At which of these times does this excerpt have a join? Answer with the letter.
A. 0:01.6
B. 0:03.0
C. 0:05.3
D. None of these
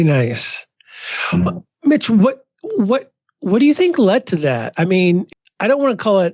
C